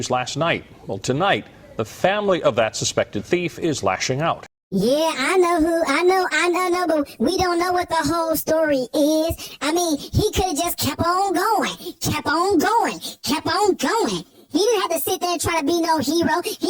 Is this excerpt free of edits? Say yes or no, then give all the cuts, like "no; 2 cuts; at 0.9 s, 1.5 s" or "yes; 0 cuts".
no; 1 cut; at 4.5 s